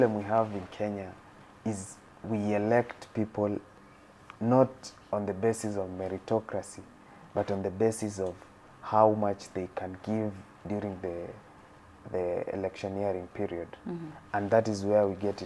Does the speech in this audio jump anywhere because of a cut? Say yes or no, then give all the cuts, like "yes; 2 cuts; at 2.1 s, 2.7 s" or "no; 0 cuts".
no; 0 cuts